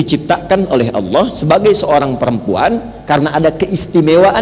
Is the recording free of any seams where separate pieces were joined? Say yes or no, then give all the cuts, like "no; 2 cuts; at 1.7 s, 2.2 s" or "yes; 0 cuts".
yes; 0 cuts